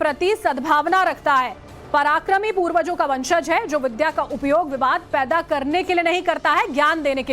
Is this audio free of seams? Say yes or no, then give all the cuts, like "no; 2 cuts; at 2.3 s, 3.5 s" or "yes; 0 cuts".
no; 1 cut; at 1.1 s